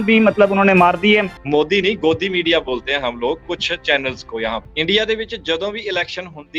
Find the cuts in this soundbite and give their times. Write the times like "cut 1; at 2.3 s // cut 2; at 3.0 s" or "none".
cut 1; at 1.4 s // cut 2; at 4.7 s